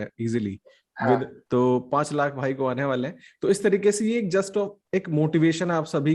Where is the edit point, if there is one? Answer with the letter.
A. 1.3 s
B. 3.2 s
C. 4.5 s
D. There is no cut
A